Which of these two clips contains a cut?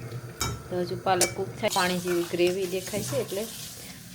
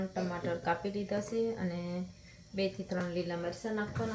first; 1 cut; at 1.7 s

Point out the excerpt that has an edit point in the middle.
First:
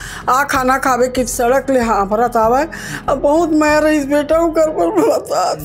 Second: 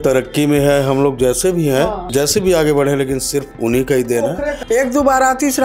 second; 3 cuts; at 2.0 s, 3.5 s, 4.6 s

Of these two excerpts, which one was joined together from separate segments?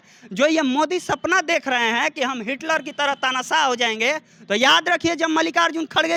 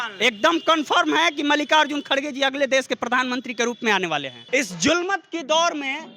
second; 1 cut; at 4.3 s

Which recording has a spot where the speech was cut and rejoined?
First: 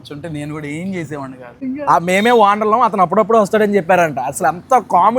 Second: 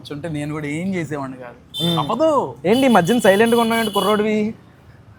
first; 1 cut; at 1.6 s

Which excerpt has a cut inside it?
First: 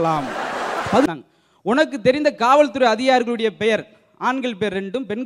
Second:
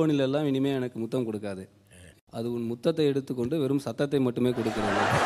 first; 1 cut; at 1.1 s

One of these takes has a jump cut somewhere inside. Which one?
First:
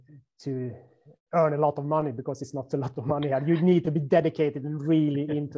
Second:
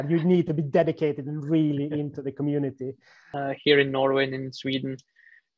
second; 1 cut; at 3.2 s

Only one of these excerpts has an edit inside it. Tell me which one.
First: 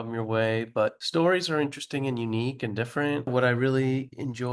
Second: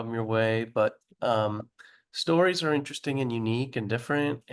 first; 2 cuts; at 1.0 s, 3.3 s

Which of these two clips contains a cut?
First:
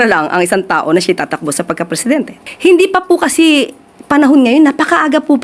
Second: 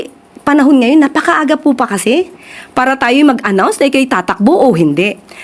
first; 1 cut; at 2.4 s

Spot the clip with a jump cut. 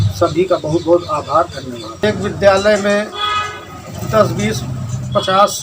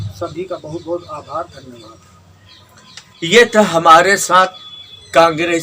first; 1 cut; at 2.0 s

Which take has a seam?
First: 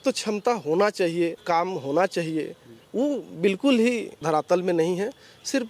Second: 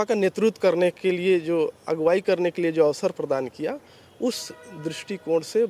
first; 2 cuts; at 1.4 s, 4.1 s

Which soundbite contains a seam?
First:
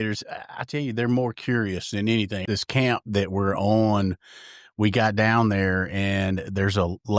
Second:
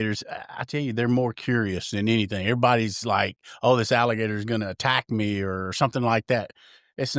first; 1 cut; at 2.4 s

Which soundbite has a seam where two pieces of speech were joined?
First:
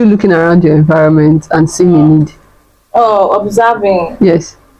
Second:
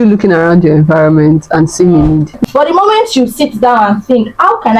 second; 1 cut; at 2.4 s

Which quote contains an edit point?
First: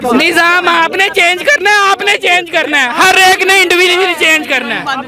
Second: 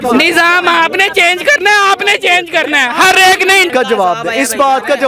second; 1 cut; at 3.7 s

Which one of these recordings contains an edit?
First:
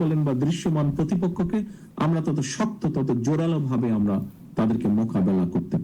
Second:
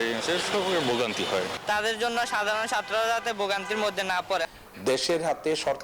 second; 2 cuts; at 1.6 s, 4.5 s

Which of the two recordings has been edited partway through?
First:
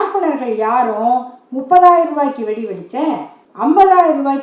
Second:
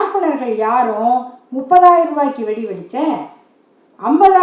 first; 1 cut; at 3.4 s

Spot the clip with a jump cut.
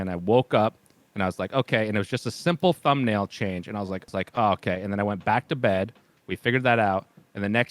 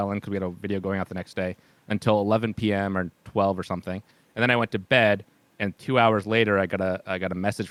first; 1 cut; at 4.1 s

